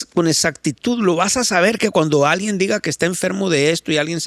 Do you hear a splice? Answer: no; 0 cuts

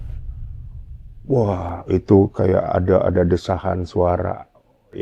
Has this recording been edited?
yes; 1 cut; at 1.1 s

